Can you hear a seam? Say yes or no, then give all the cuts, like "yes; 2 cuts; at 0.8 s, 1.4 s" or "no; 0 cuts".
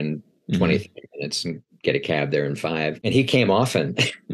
yes; 1 cut; at 3.0 s